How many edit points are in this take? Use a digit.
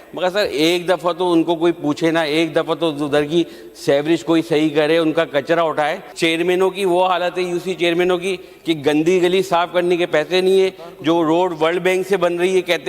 1